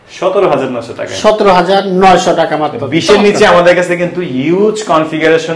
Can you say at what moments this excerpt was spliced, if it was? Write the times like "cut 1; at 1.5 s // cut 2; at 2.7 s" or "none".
none